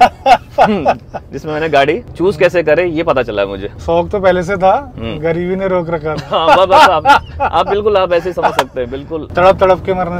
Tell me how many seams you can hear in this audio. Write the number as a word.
two